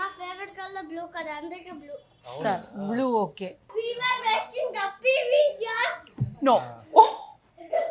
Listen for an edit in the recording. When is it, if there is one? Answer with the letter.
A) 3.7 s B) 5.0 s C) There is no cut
A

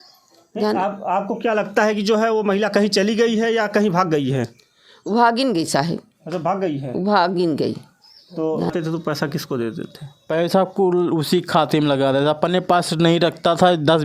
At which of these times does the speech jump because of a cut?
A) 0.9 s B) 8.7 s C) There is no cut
B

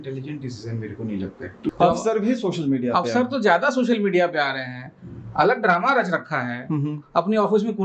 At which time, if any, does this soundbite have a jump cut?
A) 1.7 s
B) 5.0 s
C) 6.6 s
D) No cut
A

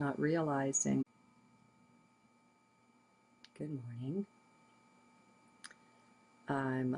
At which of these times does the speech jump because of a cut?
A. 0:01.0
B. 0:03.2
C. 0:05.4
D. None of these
D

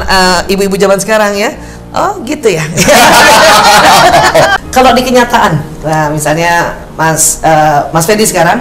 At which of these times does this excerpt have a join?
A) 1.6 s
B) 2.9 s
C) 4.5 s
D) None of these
C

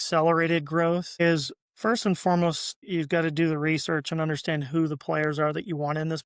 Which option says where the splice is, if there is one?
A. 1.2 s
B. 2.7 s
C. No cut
B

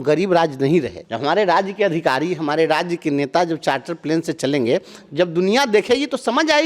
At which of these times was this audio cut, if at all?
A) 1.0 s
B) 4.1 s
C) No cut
A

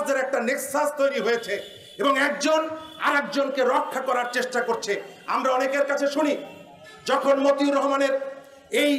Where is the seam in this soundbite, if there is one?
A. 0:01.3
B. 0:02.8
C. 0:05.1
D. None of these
D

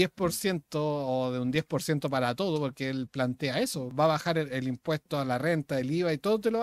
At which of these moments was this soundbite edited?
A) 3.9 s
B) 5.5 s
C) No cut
A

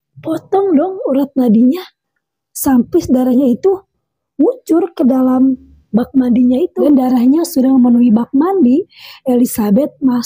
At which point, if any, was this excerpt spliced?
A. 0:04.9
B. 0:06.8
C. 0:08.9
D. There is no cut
B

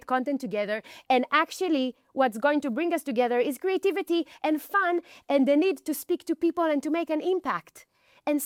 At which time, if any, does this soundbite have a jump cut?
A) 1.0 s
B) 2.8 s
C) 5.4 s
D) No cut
D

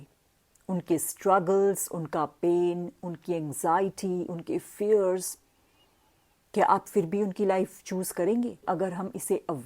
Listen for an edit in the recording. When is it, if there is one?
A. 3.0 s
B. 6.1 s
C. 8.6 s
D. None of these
C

